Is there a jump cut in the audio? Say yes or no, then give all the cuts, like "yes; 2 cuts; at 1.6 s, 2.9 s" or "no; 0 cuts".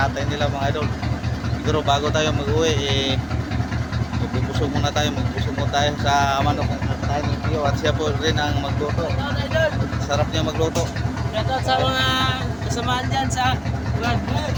no; 0 cuts